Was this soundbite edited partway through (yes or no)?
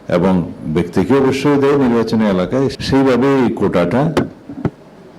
yes